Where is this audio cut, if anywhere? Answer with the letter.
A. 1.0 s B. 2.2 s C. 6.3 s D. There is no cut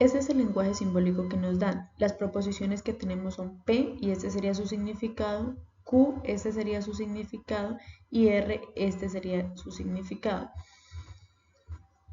C